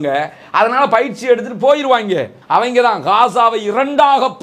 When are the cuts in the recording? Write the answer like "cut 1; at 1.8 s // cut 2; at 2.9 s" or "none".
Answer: cut 1; at 2.3 s